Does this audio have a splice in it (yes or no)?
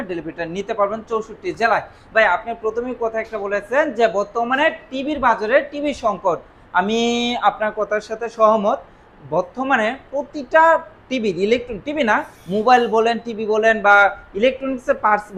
no